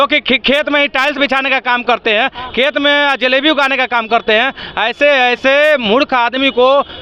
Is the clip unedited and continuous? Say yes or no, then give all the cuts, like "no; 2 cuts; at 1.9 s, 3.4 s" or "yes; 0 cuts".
yes; 0 cuts